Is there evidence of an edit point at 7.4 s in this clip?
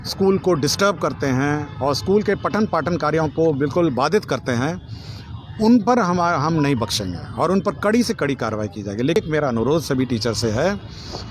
no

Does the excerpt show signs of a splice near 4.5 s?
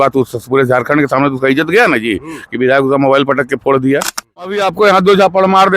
yes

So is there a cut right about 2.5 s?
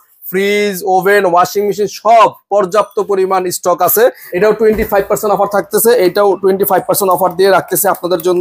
no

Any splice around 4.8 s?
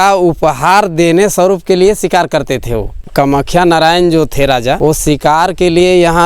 yes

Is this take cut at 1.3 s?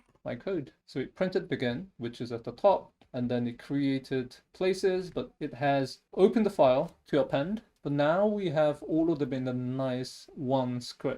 no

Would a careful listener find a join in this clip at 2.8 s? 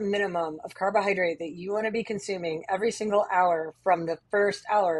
no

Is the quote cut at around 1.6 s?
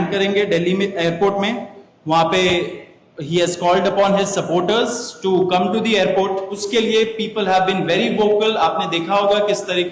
no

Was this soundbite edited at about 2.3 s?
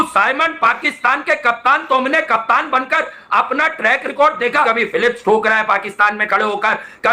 no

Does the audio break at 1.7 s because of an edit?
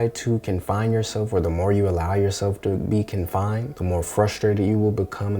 no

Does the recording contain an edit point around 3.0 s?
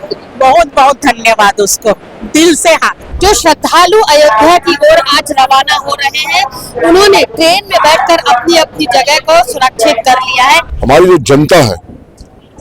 yes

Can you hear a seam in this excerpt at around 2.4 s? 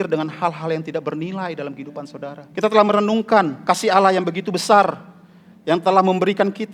yes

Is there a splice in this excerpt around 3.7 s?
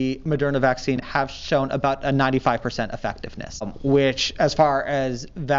yes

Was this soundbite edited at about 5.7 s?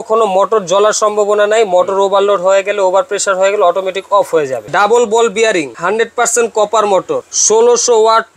yes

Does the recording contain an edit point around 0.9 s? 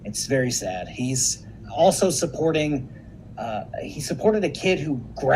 yes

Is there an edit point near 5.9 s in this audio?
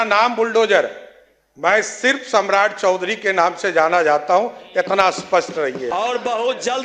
yes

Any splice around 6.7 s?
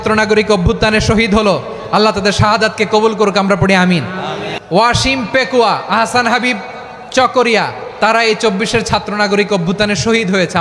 no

